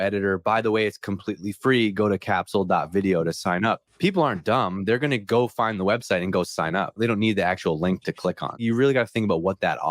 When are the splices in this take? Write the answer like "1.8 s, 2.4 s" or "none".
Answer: 3.9 s, 7.0 s, 8.6 s